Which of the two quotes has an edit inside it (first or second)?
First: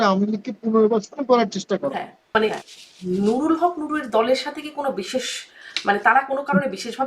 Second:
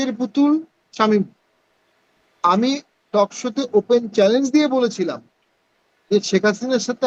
first